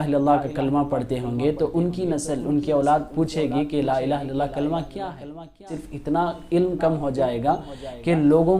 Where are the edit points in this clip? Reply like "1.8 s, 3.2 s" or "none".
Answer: 5.7 s

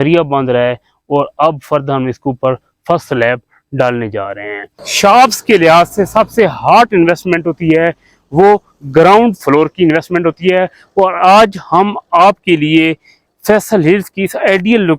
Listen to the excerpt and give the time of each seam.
4.8 s

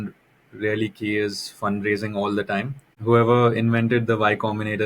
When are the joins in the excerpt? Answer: 2.9 s

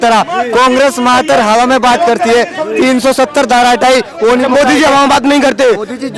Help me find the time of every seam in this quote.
none

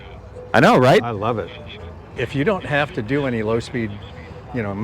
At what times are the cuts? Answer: 2.1 s

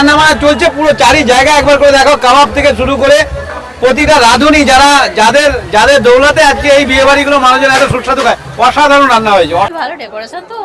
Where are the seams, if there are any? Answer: 9.7 s

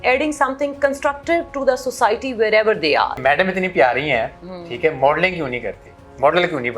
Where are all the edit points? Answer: 3.2 s

